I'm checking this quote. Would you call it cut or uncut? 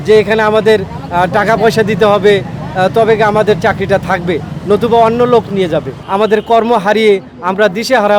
cut